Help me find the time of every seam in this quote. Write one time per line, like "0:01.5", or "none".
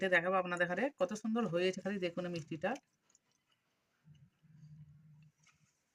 none